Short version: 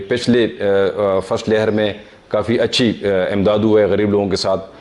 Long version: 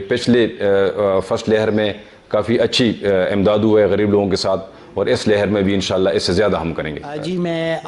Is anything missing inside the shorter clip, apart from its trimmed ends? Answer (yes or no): no